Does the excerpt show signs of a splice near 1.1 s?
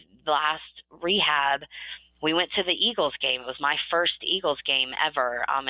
no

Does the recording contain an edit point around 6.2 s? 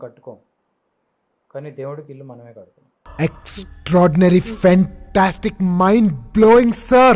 no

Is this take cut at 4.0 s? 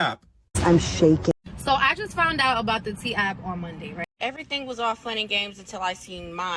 yes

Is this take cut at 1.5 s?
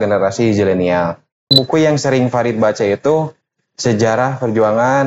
yes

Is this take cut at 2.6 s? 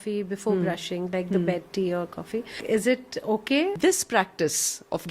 yes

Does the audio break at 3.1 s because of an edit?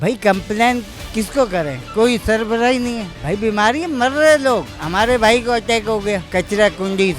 no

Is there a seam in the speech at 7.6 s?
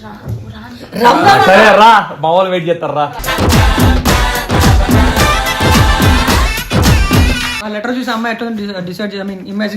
yes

